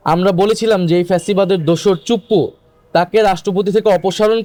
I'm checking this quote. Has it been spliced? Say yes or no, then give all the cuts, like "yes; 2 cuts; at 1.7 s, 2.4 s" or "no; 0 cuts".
no; 0 cuts